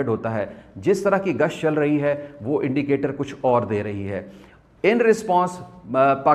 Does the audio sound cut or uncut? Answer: uncut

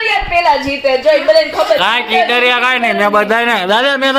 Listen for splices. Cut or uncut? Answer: uncut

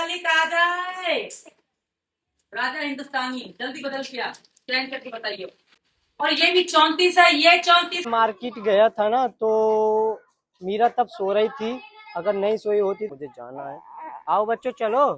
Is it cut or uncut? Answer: cut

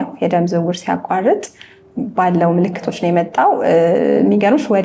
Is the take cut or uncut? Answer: uncut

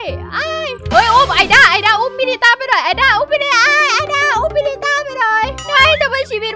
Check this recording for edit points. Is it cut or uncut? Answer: uncut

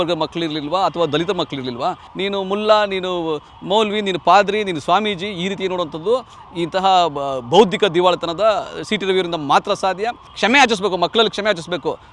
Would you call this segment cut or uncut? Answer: cut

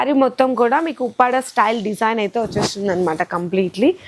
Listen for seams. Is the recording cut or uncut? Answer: uncut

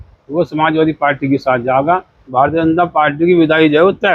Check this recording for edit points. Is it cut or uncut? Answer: cut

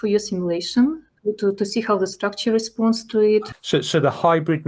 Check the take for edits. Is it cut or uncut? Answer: cut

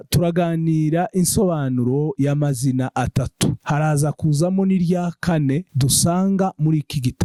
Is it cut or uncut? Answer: uncut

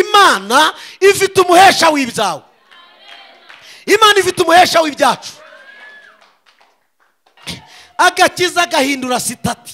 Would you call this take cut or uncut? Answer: cut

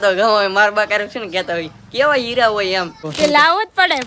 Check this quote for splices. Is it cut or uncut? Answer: cut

